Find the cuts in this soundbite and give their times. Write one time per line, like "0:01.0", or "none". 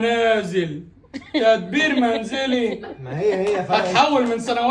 none